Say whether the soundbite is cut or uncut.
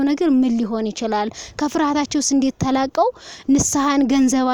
uncut